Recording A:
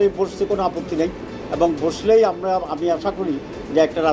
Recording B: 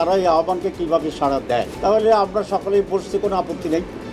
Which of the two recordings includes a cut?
B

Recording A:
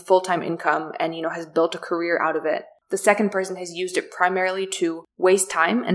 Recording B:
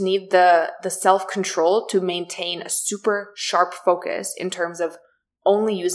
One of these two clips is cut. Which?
A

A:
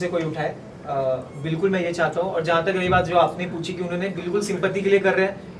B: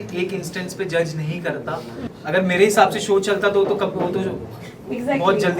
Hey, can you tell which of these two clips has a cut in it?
B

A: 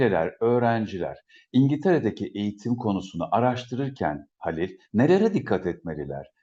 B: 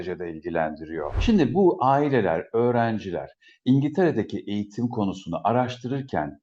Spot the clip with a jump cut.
B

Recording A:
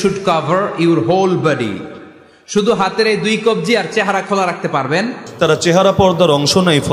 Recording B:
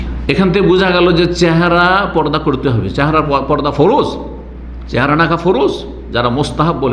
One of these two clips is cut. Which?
A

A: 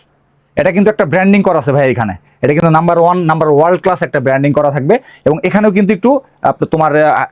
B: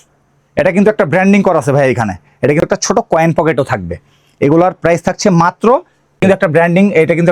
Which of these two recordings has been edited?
B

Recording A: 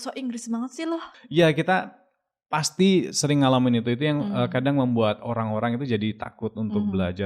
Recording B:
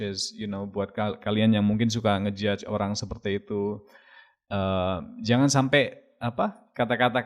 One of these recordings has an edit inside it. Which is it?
A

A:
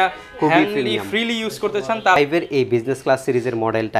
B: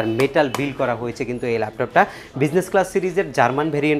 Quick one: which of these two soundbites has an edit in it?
A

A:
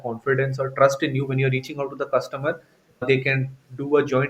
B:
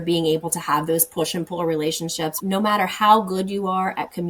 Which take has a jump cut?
B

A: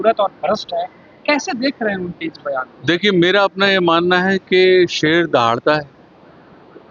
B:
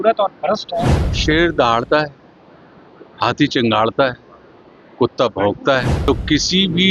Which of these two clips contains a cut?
B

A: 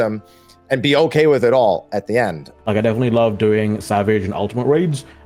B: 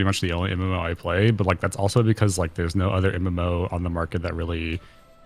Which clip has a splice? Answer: A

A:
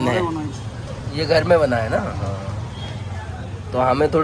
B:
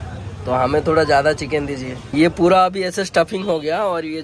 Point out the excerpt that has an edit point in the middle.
B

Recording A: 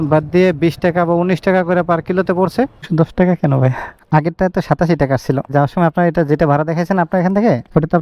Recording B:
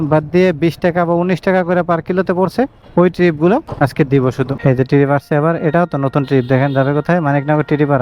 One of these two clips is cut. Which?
A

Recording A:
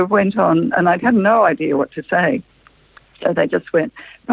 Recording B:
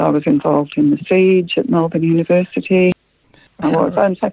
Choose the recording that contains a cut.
B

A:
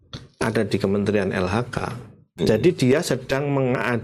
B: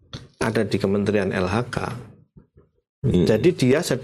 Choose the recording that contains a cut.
A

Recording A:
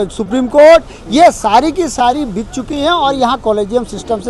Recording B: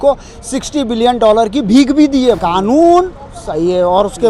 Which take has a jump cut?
B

